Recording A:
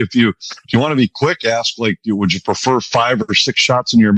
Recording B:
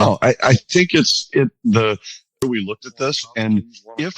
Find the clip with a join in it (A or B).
B